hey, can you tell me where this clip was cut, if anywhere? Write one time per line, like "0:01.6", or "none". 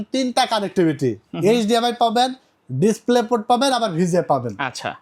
none